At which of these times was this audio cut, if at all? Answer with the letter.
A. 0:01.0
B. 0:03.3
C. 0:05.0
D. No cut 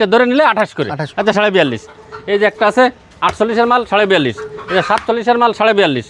A